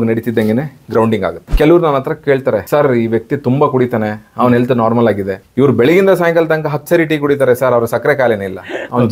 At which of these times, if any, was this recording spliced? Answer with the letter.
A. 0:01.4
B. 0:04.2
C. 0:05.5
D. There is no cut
A